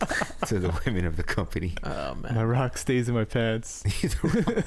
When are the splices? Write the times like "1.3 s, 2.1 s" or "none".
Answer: 1.8 s

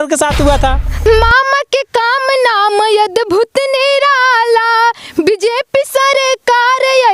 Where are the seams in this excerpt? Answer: 1.0 s

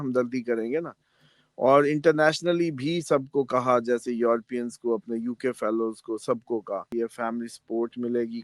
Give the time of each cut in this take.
6.9 s

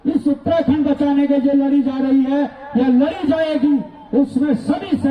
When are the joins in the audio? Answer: none

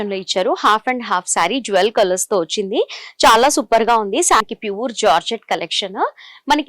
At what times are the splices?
4.4 s

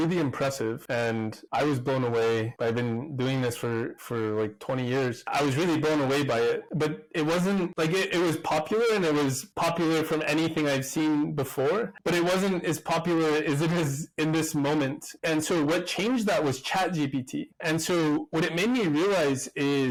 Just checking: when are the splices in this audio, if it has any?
none

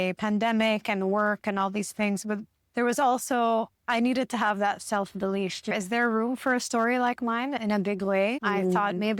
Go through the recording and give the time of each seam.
5.7 s, 7.6 s, 8.4 s

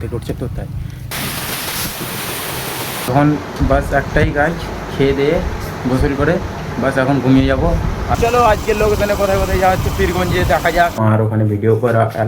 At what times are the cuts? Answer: 1.1 s, 3.1 s, 8.1 s, 11.0 s

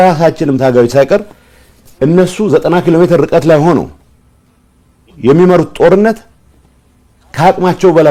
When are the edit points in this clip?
none

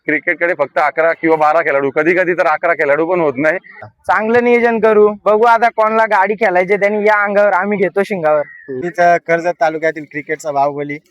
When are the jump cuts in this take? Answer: 3.7 s, 8.6 s

